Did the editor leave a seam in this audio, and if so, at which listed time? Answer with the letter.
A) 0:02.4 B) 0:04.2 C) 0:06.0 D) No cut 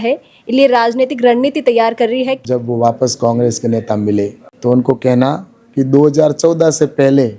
A